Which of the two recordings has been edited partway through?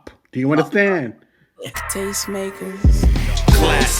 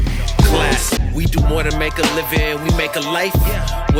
first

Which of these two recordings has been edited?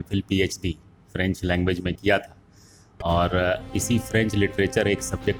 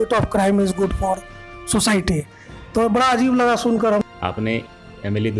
second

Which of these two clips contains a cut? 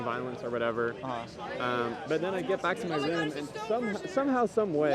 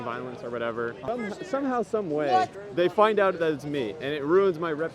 second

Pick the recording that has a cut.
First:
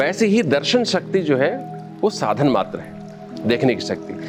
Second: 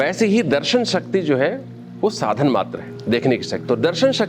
second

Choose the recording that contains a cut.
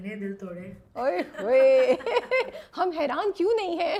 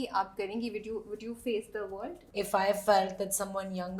second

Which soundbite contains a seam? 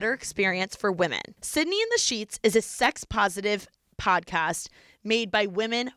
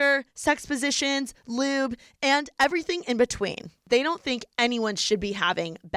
second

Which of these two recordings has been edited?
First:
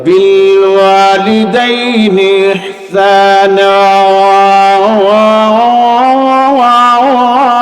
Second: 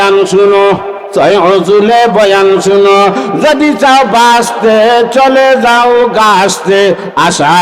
second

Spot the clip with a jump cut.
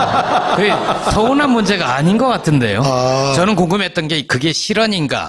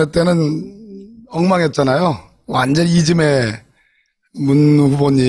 first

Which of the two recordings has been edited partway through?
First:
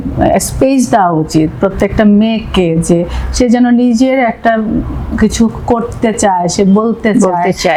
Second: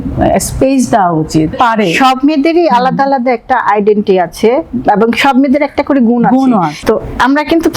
second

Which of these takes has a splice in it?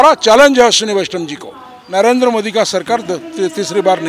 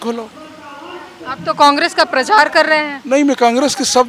first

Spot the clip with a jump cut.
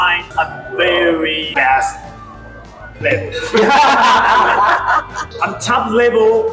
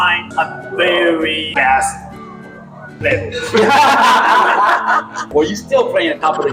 first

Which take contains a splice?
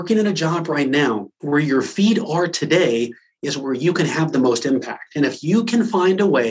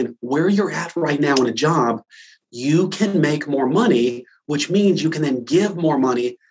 first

